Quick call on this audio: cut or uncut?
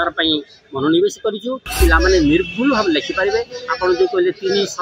cut